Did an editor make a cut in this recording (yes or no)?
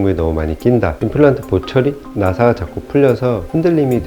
yes